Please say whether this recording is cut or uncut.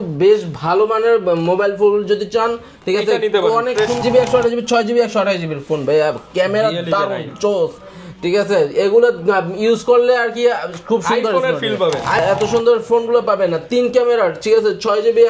cut